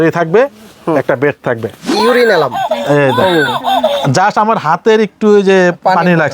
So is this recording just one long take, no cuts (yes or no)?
no